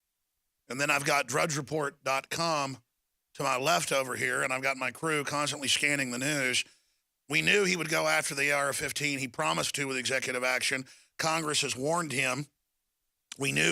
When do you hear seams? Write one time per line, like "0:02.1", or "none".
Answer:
0:06.1